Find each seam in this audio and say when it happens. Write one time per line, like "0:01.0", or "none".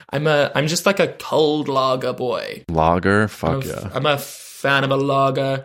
0:01.2
0:02.6